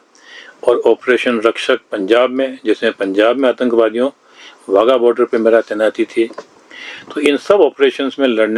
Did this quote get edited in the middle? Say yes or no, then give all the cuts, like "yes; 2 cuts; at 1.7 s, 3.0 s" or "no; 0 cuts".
no; 0 cuts